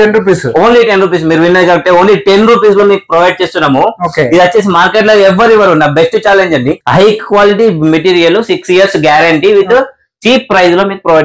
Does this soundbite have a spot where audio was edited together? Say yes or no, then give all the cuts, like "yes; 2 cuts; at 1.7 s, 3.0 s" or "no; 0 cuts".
yes; 1 cut; at 6.8 s